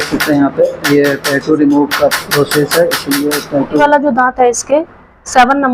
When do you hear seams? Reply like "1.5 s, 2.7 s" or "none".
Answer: 3.8 s